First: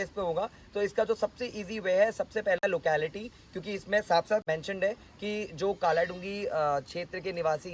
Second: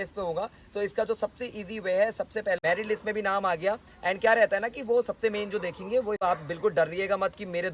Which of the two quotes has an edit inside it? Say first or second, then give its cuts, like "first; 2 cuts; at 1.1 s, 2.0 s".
second; 2 cuts; at 2.6 s, 6.2 s